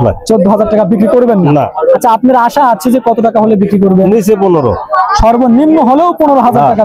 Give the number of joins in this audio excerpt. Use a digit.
0